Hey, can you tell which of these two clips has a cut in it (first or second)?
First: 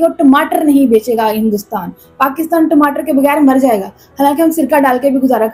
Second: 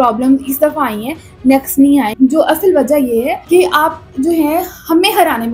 second